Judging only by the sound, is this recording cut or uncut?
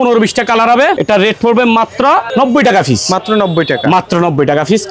cut